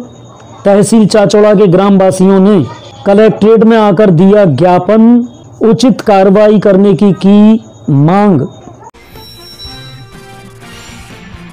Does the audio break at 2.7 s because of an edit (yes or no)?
no